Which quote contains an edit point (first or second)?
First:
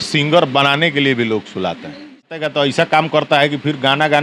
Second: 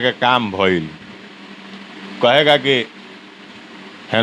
first